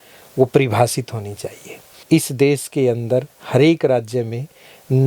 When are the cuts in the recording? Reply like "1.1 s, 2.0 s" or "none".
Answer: 2.0 s